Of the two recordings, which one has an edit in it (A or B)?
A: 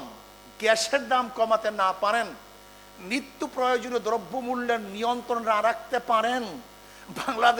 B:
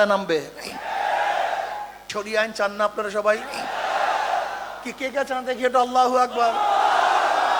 B